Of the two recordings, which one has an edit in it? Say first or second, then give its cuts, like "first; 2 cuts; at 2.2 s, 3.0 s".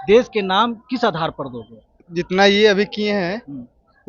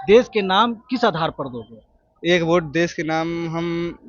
first; 1 cut; at 2.0 s